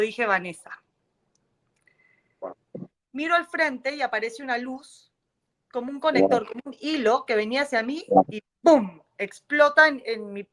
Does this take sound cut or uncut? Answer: cut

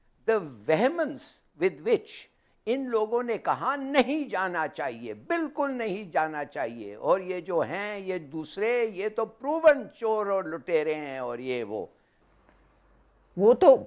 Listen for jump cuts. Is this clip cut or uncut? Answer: cut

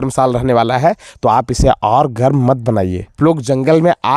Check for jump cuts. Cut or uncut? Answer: cut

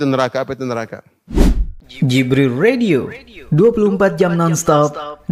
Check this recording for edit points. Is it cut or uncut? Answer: cut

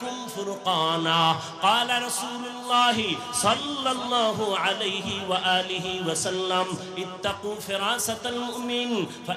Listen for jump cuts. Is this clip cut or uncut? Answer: uncut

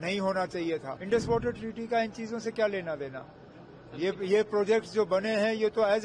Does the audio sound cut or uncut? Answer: cut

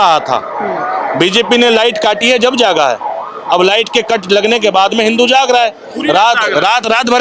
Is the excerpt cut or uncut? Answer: uncut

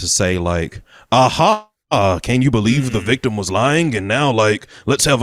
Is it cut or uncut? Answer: uncut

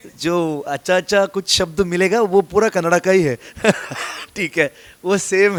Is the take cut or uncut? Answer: uncut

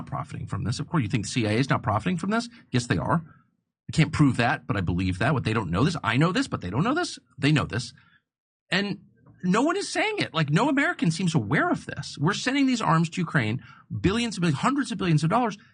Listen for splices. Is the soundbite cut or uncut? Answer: cut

